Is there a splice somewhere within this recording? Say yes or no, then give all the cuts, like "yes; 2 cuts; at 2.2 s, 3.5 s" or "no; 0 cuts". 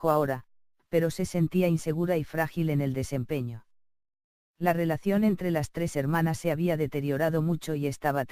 yes; 1 cut; at 5.0 s